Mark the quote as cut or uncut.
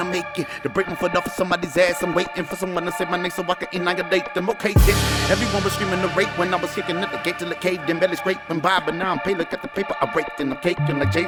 uncut